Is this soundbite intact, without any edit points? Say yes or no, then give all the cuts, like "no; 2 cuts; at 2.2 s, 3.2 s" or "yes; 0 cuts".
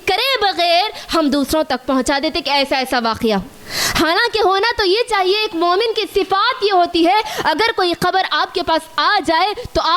yes; 0 cuts